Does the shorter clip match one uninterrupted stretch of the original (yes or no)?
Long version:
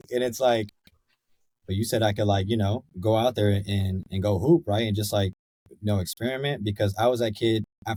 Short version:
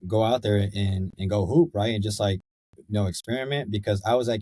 yes